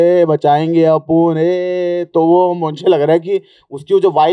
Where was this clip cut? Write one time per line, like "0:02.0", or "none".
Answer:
none